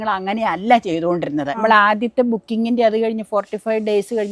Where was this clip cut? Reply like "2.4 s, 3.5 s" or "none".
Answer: 1.6 s